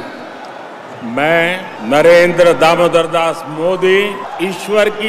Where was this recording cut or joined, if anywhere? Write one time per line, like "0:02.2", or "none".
0:01.7
0:04.2